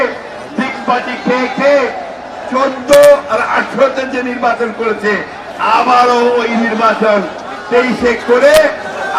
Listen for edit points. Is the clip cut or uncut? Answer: uncut